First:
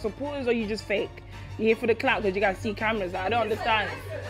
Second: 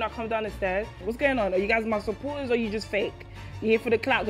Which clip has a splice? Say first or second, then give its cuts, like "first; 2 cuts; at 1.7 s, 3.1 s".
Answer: second; 1 cut; at 1.0 s